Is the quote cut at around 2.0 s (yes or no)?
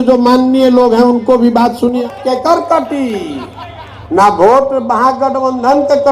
yes